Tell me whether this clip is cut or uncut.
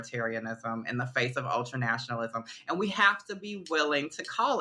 uncut